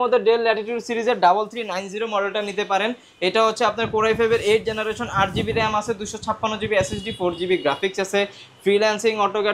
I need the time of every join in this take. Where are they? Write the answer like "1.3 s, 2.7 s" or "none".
none